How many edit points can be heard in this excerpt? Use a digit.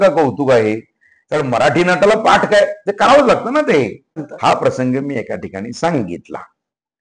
1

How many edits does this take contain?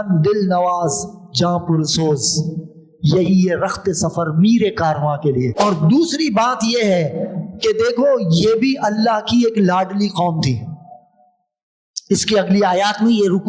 1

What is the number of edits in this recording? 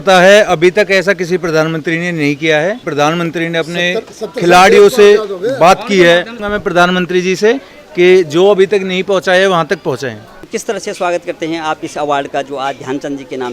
3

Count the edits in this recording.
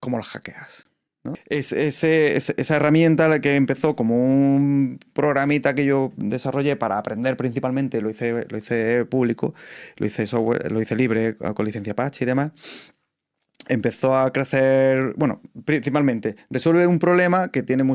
1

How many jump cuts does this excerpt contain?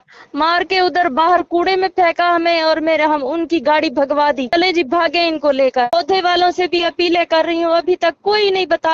2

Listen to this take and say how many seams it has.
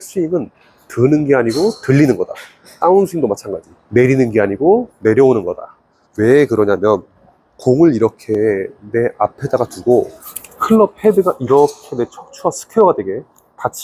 0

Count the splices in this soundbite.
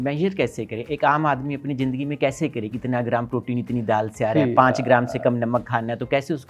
0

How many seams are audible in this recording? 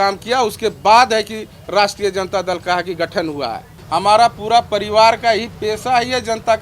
1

